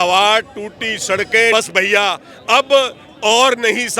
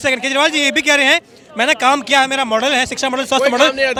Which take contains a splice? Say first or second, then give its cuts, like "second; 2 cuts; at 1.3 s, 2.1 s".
first; 1 cut; at 1.5 s